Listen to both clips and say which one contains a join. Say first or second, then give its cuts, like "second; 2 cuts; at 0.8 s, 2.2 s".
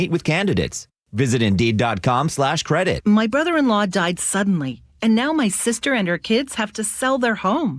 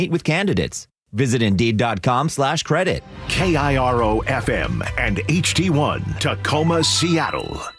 first; 1 cut; at 3.0 s